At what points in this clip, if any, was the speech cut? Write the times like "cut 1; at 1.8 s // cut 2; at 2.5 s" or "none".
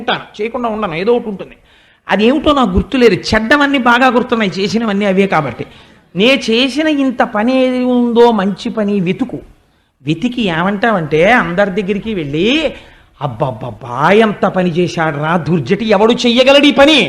none